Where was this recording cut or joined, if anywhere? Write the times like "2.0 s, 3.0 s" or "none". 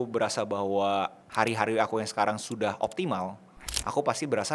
1.2 s